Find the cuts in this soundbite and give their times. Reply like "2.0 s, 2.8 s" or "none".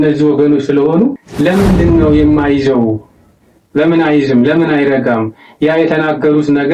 1.2 s